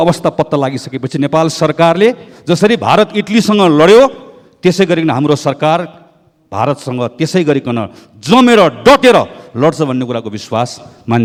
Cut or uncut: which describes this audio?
uncut